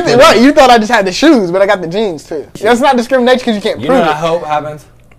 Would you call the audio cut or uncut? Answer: cut